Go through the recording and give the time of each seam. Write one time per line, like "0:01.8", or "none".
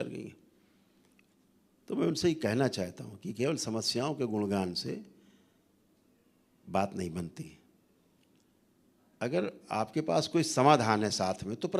0:01.4